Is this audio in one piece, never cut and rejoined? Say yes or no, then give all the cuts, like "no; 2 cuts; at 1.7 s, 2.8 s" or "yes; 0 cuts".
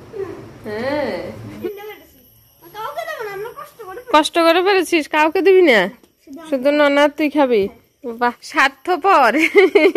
no; 2 cuts; at 1.5 s, 8.5 s